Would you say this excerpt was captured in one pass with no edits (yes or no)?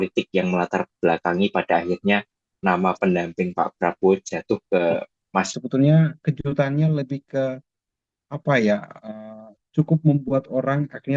no